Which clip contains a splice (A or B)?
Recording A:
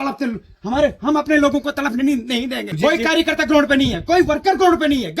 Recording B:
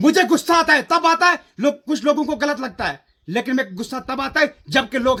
A